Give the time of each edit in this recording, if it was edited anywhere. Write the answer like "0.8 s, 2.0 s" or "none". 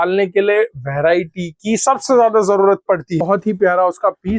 3.2 s